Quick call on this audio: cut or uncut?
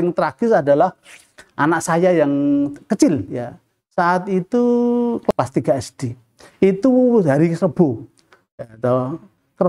uncut